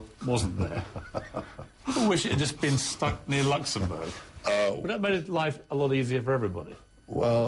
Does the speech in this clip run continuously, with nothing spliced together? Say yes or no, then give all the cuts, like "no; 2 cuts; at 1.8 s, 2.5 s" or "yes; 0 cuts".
yes; 0 cuts